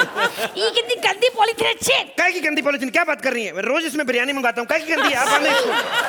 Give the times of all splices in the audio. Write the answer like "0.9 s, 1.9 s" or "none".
none